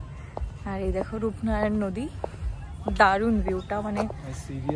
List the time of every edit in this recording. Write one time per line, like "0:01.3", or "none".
none

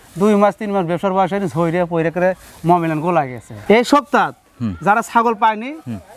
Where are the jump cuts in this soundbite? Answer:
0:03.5

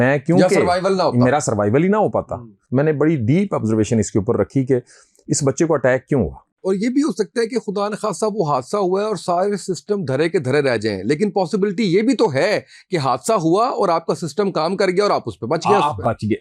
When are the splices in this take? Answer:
0:02.5
0:06.4

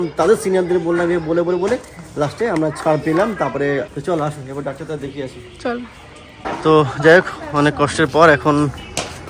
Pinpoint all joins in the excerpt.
0:06.3

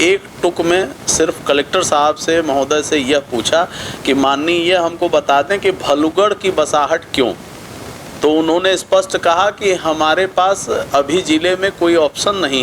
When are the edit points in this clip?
none

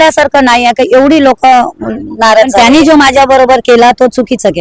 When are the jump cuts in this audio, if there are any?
0:02.5

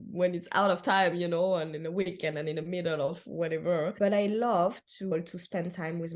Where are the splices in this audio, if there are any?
0:03.9
0:05.1

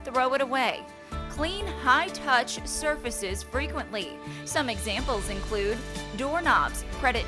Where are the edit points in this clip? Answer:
none

